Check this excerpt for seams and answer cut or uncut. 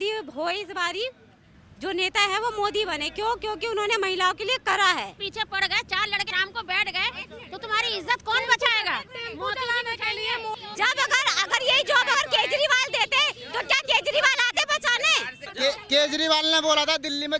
cut